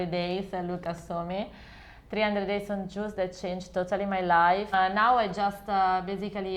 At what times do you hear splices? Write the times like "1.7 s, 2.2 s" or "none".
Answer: 4.7 s